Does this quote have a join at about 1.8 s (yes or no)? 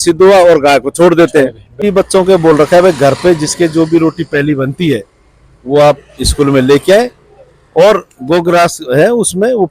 yes